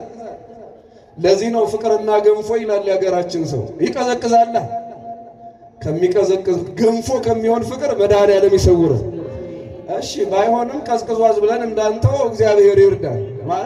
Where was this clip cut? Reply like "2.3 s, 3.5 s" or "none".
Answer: none